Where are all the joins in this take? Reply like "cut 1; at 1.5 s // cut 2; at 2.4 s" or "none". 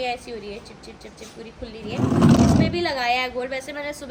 none